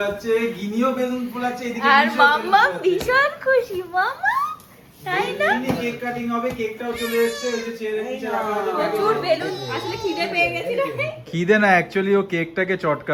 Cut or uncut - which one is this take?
cut